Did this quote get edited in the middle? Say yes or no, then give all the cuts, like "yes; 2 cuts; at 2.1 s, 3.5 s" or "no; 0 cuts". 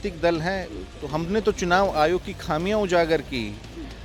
no; 0 cuts